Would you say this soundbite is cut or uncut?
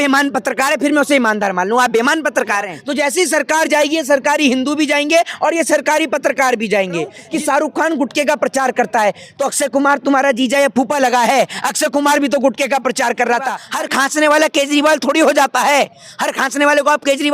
cut